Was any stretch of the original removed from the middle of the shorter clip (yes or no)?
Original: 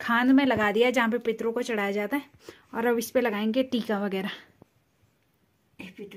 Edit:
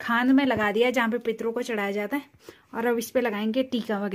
no